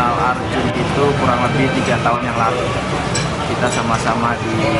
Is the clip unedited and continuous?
yes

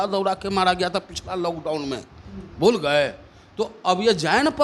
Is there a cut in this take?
no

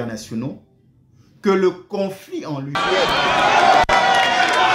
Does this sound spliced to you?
yes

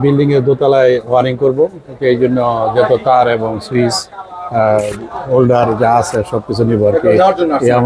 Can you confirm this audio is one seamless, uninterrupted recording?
yes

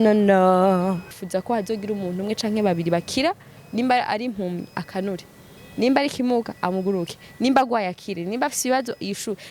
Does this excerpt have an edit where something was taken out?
yes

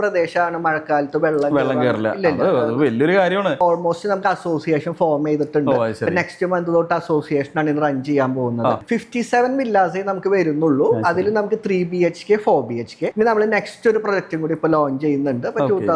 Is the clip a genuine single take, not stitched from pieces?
no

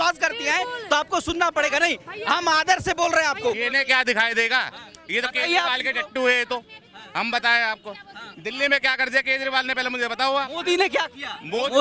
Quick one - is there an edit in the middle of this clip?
no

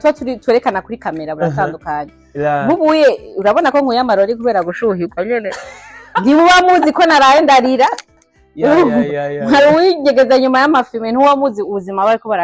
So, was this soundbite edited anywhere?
no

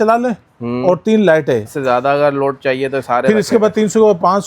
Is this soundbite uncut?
no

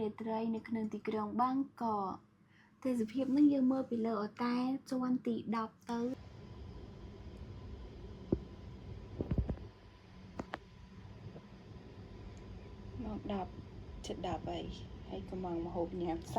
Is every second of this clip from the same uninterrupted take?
no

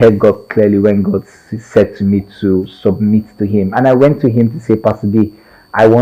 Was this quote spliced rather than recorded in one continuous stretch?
no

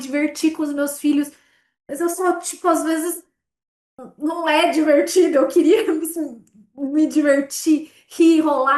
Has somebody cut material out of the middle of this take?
no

